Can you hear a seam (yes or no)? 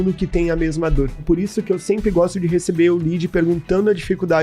yes